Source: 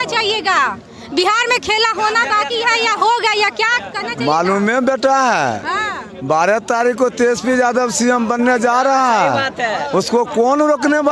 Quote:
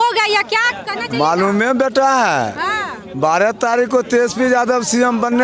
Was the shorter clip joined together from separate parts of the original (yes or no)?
no